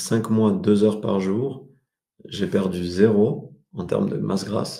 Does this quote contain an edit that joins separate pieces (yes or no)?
no